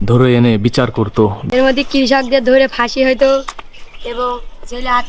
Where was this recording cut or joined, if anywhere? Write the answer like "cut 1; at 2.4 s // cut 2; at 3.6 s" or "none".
cut 1; at 1.4 s